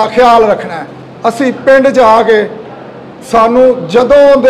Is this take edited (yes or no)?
no